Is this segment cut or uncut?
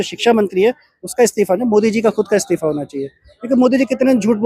uncut